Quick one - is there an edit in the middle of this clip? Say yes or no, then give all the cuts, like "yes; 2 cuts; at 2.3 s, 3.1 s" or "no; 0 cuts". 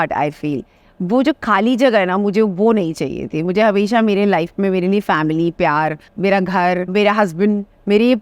yes; 2 cuts; at 6.1 s, 6.9 s